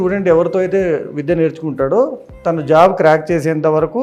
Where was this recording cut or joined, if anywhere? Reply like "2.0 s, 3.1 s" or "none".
none